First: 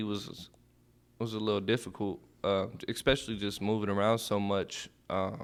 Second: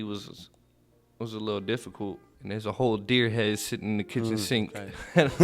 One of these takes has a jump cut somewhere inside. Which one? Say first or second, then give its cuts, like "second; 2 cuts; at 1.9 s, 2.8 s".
second; 1 cut; at 2.3 s